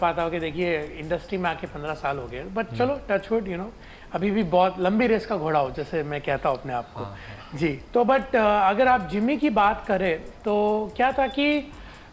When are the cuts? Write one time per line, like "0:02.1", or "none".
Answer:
none